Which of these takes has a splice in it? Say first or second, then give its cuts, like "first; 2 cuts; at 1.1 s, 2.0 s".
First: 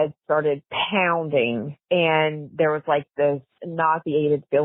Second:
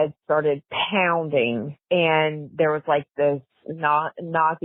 first; 1 cut; at 3.6 s